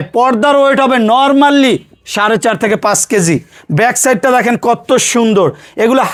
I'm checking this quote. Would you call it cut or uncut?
uncut